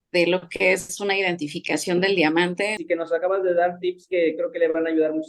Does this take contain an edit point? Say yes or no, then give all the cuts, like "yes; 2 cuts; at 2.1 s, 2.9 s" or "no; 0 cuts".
yes; 1 cut; at 2.8 s